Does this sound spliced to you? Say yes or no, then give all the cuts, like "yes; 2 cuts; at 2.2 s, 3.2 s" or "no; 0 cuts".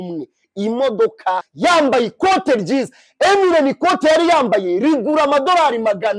yes; 1 cut; at 1.5 s